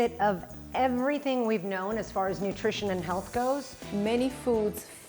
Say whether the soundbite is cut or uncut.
cut